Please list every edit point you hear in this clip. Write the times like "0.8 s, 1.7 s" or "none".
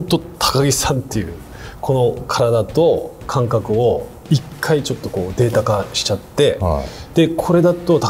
none